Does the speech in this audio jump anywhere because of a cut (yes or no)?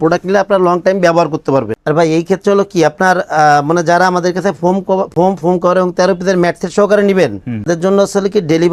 no